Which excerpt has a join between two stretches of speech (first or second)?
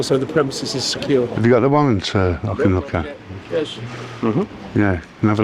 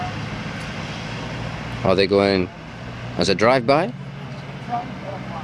first